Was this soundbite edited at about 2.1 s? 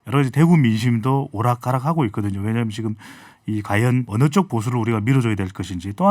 no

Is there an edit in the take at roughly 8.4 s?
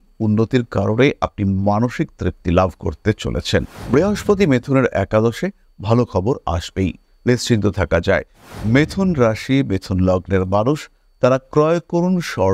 yes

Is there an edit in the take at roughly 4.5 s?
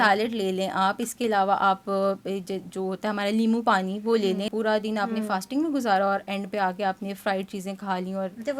yes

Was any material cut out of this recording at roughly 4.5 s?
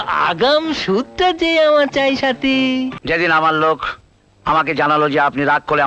no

